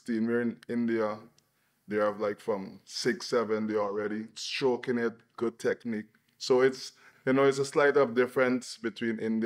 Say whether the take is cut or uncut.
uncut